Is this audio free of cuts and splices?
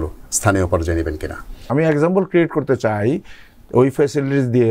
no; 1 cut; at 1.6 s

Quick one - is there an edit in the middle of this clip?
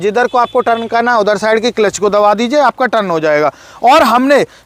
no; 0 cuts

